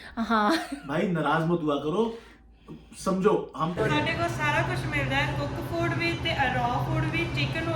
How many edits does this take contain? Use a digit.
1